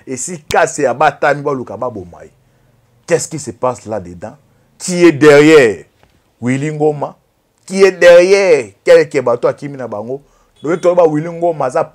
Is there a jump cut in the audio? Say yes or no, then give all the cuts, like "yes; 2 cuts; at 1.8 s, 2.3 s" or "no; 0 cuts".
yes; 1 cut; at 10.4 s